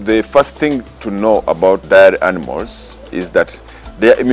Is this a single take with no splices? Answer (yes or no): no